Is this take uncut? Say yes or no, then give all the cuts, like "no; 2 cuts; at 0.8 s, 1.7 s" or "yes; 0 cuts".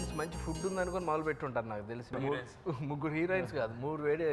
no; 1 cut; at 2.1 s